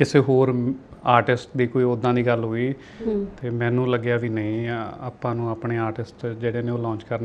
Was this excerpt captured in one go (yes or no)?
yes